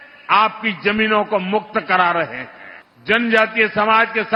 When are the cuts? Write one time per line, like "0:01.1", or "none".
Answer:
none